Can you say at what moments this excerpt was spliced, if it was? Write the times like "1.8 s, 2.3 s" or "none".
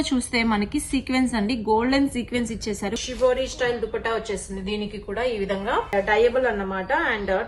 3.0 s, 5.9 s